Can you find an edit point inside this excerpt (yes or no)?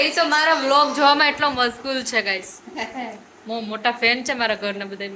no